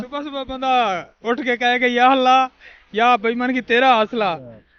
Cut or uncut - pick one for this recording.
uncut